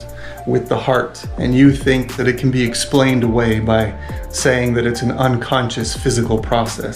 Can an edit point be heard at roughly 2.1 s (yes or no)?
yes